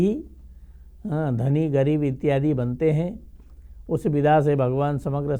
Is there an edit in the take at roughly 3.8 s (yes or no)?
no